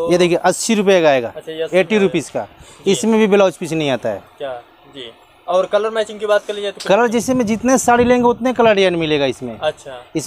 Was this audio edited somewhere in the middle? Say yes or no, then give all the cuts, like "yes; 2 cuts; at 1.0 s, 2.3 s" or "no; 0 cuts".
no; 0 cuts